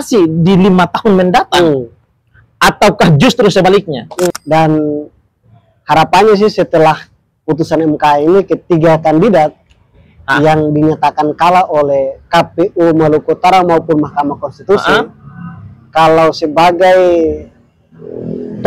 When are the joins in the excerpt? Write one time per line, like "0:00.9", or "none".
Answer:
0:04.3